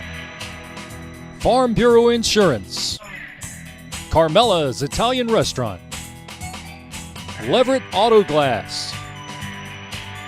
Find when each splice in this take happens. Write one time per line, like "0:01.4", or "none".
0:01.4